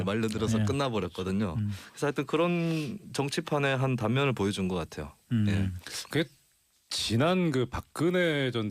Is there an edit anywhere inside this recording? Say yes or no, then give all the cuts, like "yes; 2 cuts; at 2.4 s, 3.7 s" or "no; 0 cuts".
yes; 1 cut; at 2.4 s